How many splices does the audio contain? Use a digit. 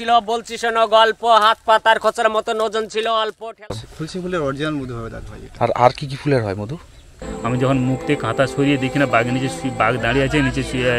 2